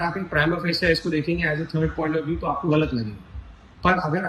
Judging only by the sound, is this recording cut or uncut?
uncut